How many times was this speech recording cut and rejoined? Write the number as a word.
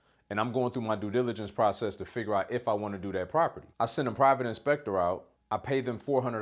two